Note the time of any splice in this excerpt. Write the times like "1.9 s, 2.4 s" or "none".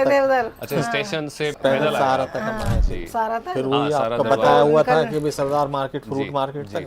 1.5 s